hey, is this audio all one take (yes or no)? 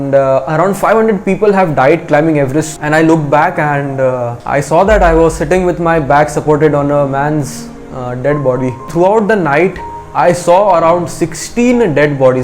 no